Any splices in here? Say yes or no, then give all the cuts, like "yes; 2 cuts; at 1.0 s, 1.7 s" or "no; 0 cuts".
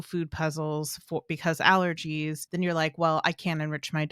yes; 1 cut; at 2.4 s